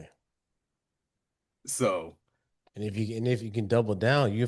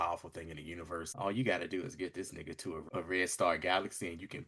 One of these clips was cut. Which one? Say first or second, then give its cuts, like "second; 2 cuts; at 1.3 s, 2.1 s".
second; 2 cuts; at 1.1 s, 2.8 s